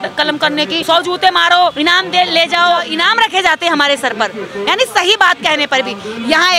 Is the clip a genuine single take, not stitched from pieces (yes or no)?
no